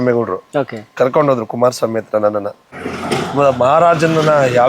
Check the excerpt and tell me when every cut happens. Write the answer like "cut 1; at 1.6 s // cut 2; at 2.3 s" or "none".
cut 1; at 2.7 s